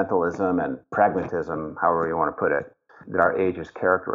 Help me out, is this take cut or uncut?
uncut